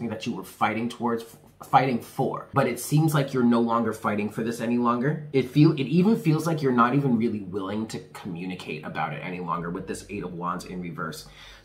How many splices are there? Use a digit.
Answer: 2